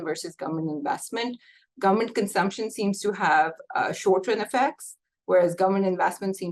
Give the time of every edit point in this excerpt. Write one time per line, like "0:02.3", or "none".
none